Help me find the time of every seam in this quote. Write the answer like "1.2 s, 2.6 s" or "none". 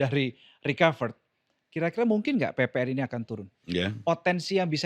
3.5 s